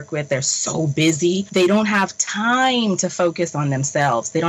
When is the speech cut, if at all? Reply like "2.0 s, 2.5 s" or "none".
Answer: 1.5 s